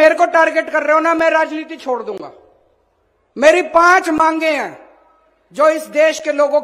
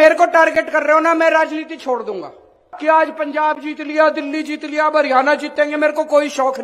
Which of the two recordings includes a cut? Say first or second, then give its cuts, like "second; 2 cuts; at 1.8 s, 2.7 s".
second; 1 cut; at 2.7 s